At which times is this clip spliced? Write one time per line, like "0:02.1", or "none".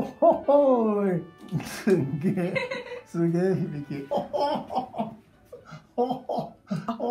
0:04.0